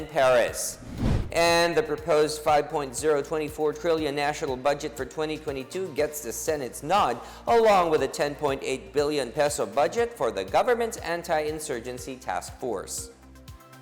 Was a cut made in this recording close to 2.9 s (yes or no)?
no